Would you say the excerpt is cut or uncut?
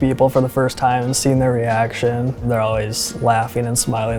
uncut